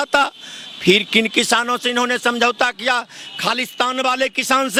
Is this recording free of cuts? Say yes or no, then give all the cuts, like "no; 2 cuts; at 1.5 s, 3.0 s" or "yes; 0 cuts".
yes; 0 cuts